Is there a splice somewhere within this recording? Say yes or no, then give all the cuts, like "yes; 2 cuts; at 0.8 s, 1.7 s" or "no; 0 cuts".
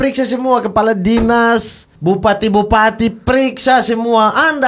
yes; 1 cut; at 1.9 s